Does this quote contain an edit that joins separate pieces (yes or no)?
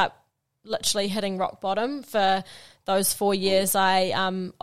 no